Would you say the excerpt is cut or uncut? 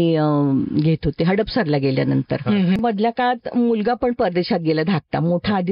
cut